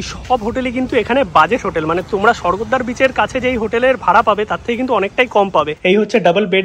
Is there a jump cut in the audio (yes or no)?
yes